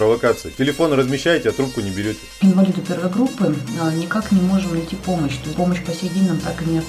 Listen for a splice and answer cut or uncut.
cut